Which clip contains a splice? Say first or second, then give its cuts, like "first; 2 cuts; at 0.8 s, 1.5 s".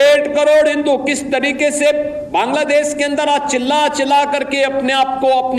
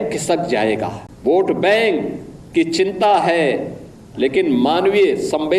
second; 1 cut; at 1.0 s